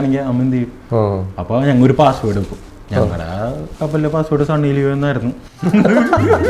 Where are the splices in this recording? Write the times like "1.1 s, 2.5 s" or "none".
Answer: none